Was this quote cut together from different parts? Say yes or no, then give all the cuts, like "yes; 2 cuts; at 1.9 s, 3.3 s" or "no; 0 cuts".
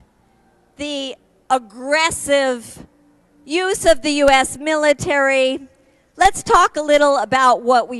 no; 0 cuts